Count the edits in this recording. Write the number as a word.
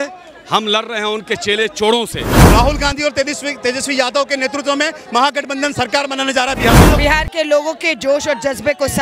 two